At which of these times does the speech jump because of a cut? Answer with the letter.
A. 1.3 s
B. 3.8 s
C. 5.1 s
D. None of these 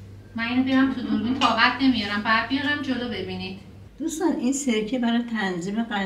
B